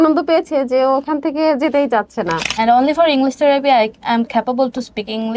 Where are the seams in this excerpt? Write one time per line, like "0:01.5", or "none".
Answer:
0:02.4